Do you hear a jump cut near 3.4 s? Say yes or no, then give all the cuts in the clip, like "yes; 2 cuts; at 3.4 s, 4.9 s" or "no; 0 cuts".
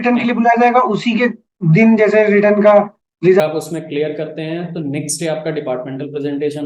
yes; 1 cut; at 3.4 s